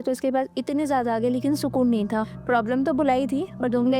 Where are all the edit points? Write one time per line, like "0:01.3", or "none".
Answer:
0:02.3

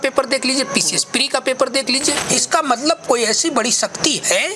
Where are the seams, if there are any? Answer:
0:02.2

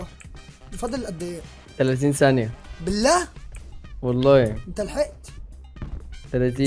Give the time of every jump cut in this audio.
0:01.6

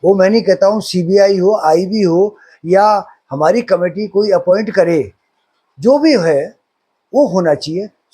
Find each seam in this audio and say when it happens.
none

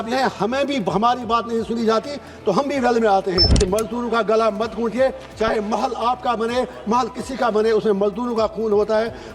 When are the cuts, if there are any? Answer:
0:03.5

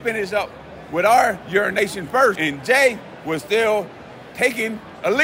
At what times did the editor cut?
0:02.4

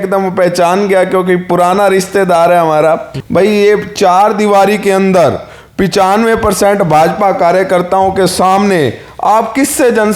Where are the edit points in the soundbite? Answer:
0:03.1

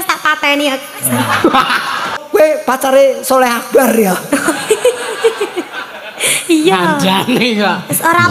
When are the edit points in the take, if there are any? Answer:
0:02.1

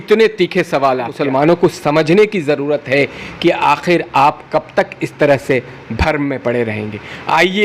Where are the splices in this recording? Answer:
0:01.2

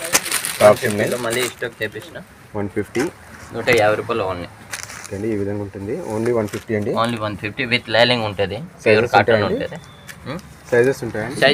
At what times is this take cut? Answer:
none

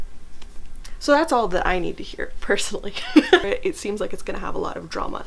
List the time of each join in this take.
0:03.5

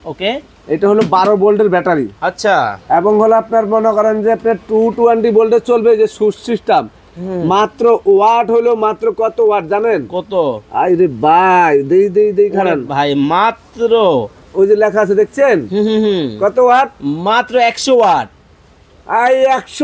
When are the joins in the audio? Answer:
none

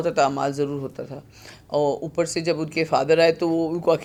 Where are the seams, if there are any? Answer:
none

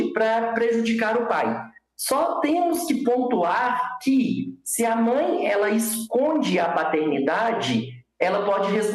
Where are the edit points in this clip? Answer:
none

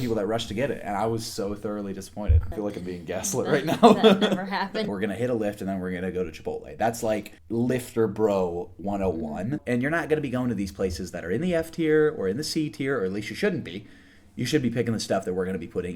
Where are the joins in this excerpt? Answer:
0:02.4
0:04.9
0:07.3
0:09.6

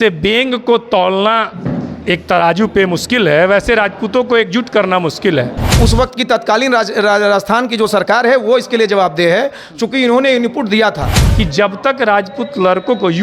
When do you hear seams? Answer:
0:05.8
0:11.2

